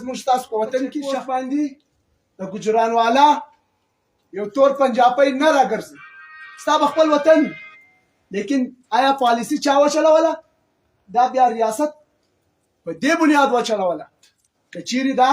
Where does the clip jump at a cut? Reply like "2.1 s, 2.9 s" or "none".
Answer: 1.1 s

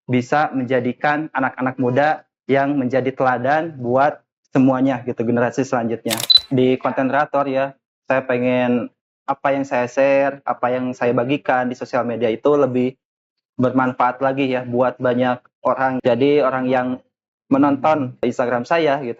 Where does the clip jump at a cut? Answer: 6.4 s, 16.0 s, 18.2 s

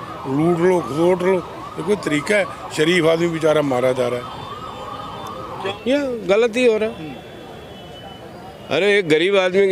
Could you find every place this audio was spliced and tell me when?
5.6 s

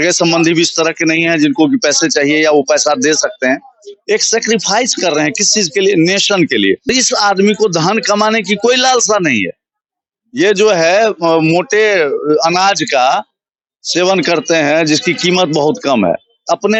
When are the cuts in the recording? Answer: none

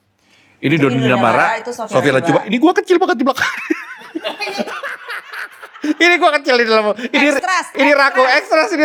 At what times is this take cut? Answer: none

